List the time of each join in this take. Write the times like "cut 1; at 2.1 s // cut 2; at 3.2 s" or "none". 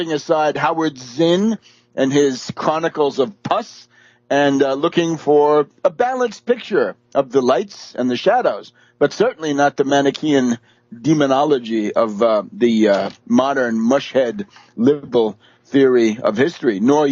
cut 1; at 6.3 s